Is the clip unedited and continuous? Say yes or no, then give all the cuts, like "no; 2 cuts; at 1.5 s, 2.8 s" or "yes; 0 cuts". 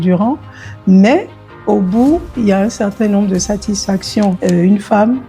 no; 1 cut; at 4.4 s